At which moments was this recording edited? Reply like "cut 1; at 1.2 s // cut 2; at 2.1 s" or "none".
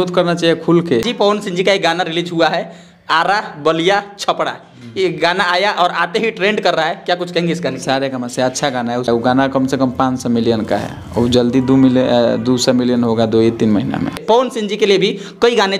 cut 1; at 1.1 s // cut 2; at 9.1 s // cut 3; at 14.2 s